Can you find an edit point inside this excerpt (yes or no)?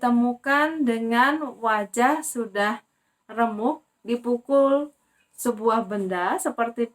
no